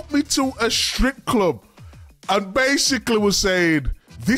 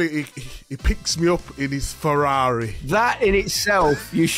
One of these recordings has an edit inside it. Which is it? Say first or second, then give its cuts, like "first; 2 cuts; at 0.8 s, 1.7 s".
second; 1 cut; at 2.8 s